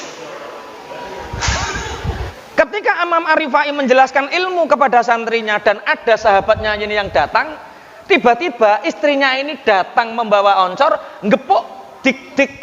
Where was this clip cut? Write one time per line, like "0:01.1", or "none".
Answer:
0:02.4